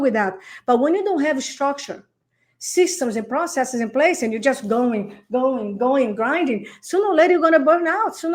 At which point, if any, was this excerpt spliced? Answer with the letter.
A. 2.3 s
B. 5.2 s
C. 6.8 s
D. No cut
D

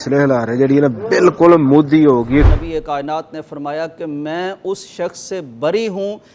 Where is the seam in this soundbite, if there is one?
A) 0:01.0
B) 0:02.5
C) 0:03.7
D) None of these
B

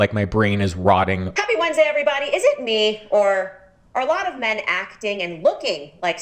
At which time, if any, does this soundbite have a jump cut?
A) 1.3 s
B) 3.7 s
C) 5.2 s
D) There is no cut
A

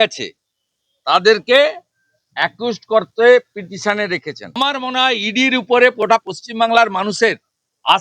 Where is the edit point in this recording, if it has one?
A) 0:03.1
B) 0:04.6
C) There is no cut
B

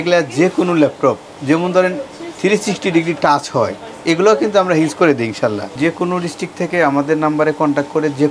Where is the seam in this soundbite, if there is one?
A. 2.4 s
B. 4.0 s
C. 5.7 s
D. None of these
C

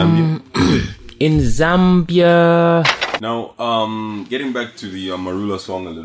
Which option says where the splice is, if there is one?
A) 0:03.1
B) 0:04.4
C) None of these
A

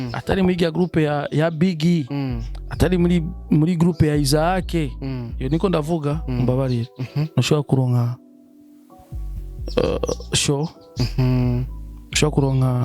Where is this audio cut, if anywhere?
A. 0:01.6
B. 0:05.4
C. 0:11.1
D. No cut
D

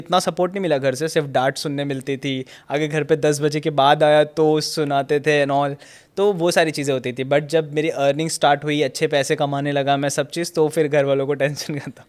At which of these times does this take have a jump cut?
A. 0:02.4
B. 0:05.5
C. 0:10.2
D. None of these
D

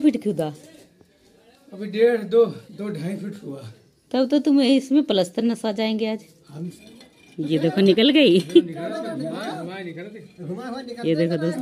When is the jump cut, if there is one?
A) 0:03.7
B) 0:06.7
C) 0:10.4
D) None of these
B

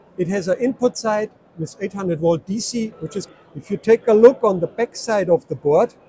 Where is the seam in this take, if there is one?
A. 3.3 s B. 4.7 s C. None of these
A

